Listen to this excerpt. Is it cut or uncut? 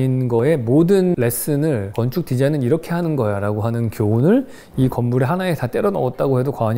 uncut